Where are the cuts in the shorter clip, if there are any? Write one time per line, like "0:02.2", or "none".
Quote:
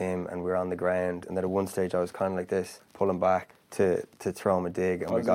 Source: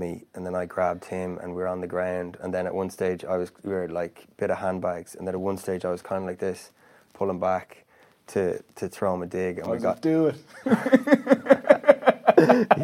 0:01.2
0:02.8
0:03.6